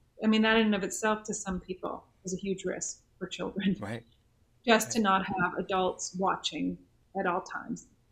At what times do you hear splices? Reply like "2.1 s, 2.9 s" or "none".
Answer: 7.0 s